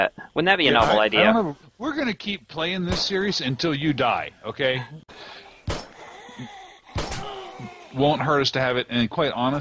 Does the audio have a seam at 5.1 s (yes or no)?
yes